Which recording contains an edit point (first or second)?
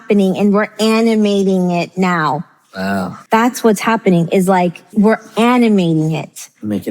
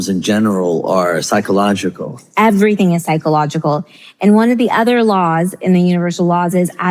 first